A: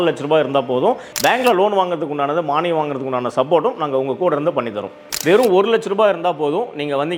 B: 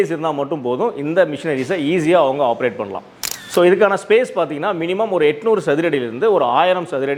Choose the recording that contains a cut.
A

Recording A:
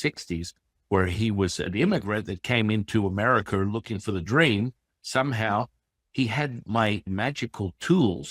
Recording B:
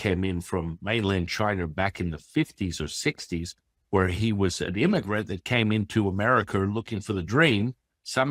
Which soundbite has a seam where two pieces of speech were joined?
A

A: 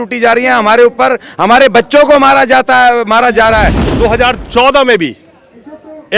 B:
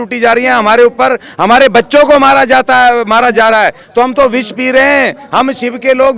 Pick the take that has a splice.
A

